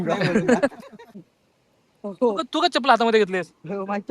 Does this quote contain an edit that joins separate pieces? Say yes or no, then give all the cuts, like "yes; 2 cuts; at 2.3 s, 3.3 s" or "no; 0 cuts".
yes; 1 cut; at 1.2 s